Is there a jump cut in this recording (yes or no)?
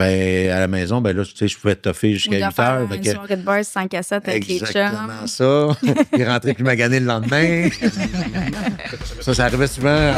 no